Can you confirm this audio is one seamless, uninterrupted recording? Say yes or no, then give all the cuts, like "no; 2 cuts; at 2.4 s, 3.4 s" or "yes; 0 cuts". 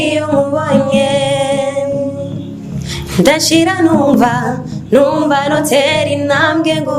yes; 0 cuts